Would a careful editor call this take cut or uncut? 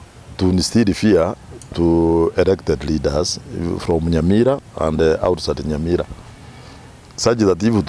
uncut